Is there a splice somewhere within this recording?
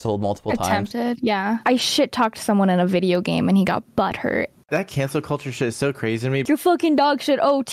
yes; 3 cuts; at 1.6 s, 4.7 s, 6.4 s

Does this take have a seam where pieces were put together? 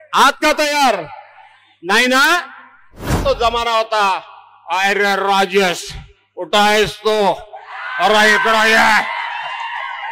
yes; 1 cut; at 3.2 s

